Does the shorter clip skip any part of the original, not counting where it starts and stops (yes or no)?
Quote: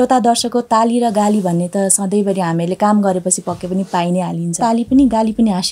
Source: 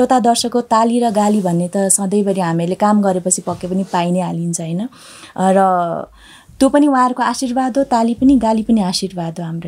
yes